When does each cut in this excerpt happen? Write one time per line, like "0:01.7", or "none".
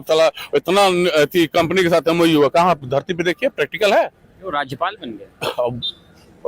none